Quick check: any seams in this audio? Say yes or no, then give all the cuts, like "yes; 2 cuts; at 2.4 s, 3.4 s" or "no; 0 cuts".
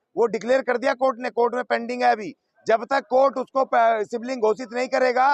no; 0 cuts